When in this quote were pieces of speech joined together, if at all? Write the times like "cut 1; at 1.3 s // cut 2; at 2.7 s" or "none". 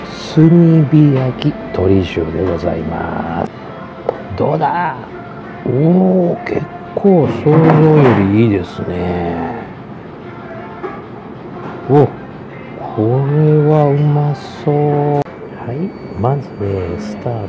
cut 1; at 3.6 s // cut 2; at 15.2 s